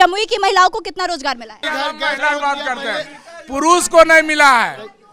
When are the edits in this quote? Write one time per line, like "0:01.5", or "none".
0:01.6